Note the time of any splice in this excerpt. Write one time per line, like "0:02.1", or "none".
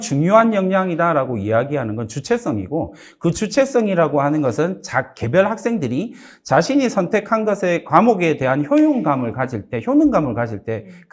none